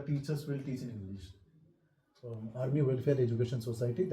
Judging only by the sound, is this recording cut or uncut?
cut